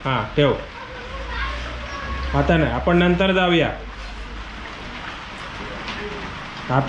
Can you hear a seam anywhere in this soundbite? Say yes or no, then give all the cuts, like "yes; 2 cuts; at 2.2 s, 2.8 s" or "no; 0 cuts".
no; 0 cuts